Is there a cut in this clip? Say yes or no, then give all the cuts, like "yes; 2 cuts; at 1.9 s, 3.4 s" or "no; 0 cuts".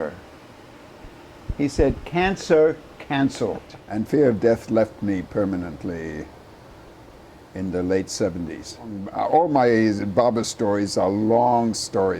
yes; 2 cuts; at 3.7 s, 9.0 s